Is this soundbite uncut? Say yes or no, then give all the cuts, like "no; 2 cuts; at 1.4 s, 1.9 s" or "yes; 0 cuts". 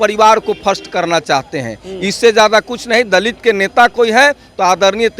yes; 0 cuts